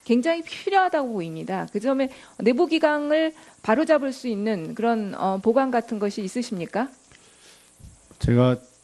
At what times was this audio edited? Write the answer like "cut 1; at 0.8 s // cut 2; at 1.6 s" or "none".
cut 1; at 2.4 s